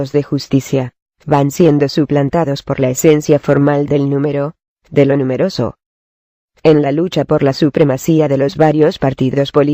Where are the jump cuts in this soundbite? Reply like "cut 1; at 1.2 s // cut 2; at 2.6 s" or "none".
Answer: cut 1; at 5.3 s